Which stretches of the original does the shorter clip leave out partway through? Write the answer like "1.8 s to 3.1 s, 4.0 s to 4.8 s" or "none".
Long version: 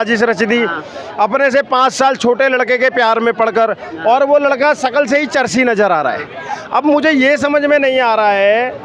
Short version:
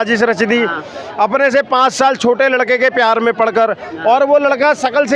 none